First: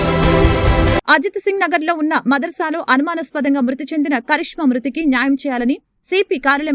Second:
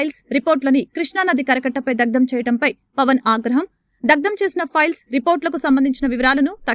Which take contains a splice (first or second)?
first